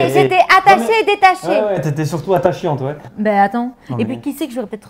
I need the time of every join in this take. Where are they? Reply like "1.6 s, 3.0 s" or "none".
3.0 s